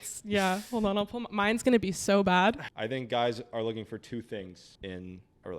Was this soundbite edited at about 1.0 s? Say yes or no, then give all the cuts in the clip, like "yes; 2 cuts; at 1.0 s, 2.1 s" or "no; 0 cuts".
no; 2 cuts; at 2.7 s, 4.6 s